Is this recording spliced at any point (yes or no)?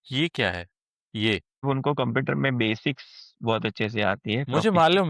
yes